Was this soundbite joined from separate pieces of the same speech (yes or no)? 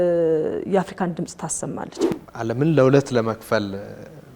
yes